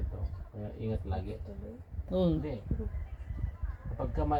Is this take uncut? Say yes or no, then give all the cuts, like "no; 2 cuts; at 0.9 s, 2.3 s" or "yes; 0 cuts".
yes; 0 cuts